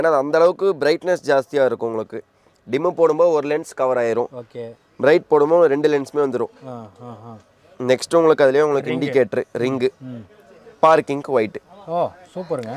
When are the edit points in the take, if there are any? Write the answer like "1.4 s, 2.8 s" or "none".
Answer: none